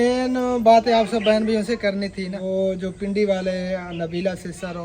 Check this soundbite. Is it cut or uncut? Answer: cut